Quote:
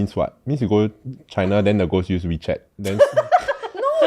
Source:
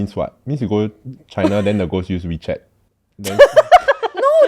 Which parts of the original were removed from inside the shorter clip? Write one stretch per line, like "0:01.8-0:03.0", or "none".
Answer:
0:02.7-0:03.1